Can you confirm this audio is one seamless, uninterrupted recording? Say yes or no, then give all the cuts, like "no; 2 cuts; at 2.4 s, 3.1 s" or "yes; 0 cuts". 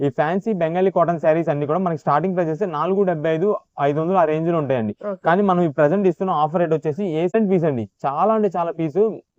no; 1 cut; at 7.3 s